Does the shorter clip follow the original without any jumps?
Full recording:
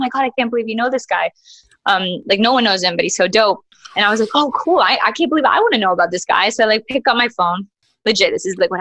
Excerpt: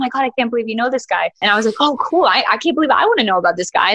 no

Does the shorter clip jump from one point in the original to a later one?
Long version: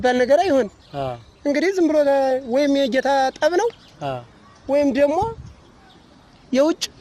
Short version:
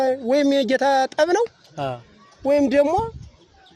no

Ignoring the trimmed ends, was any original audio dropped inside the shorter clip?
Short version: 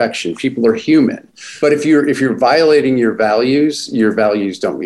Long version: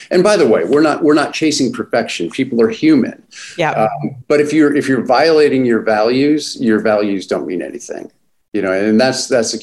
yes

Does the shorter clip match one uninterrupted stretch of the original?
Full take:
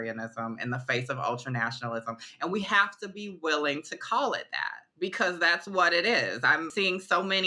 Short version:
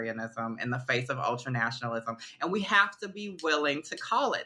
yes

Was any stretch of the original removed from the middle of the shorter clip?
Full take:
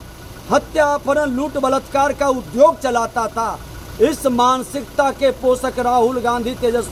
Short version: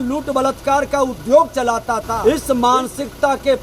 yes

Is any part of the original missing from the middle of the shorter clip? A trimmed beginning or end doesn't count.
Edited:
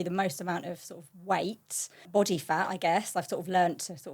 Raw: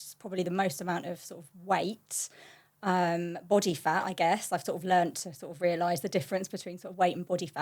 yes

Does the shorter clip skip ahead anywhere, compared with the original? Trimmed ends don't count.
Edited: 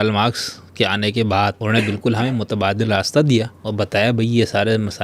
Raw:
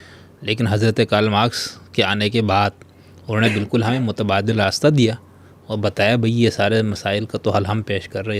yes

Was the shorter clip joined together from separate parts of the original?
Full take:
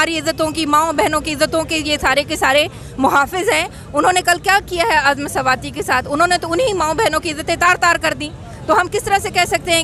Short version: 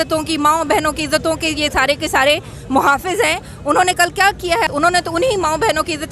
yes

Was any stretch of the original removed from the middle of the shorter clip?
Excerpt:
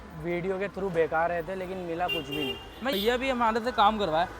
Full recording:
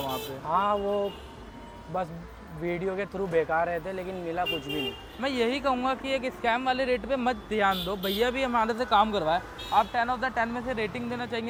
yes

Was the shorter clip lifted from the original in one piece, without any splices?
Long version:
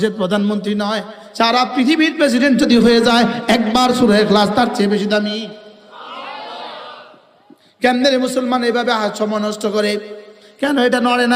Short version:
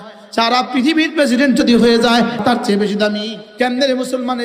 no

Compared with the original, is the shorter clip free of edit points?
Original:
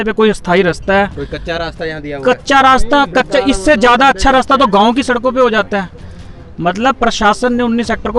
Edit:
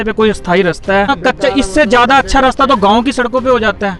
no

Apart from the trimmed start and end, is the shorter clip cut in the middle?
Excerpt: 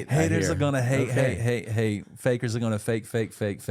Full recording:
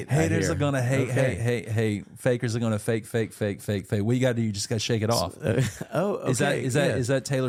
no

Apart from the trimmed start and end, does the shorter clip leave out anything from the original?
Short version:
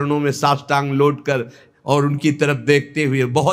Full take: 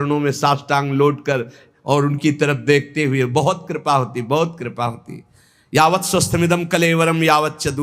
no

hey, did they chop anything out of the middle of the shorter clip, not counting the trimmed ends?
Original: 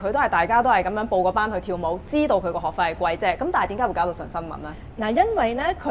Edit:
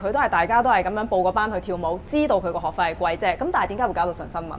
no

